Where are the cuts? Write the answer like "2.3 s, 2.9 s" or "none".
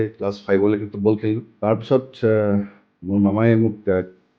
1.5 s